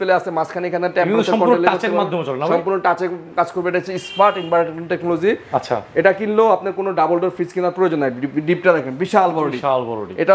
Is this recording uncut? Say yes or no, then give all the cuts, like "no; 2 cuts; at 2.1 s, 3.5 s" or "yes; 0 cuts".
yes; 0 cuts